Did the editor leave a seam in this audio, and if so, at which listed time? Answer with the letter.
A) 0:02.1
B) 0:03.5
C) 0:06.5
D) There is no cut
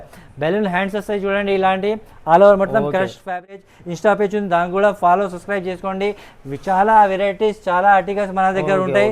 B